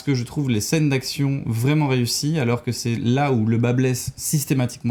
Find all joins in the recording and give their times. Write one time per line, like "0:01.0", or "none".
none